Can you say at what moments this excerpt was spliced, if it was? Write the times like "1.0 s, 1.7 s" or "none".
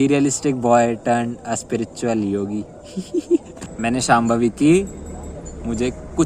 3.6 s